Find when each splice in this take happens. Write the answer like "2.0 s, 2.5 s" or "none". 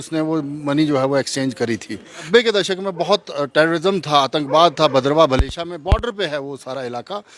2.2 s

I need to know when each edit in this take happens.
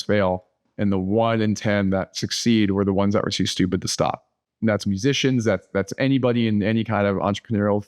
none

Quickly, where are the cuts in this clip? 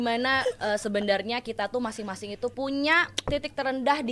2.5 s

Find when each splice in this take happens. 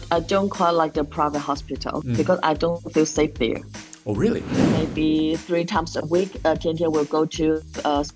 2.0 s, 4.7 s

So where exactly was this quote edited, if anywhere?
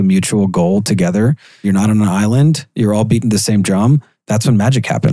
1.7 s, 4.1 s

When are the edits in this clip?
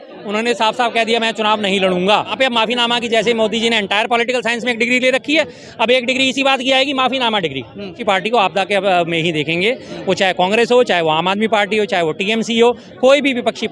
2.3 s, 8.0 s

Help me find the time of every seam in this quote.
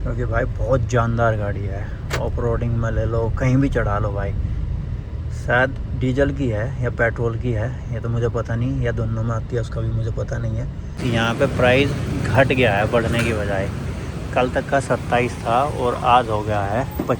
11.0 s

